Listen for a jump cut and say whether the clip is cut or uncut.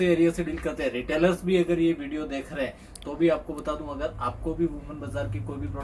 uncut